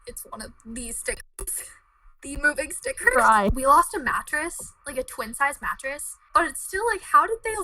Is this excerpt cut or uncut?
cut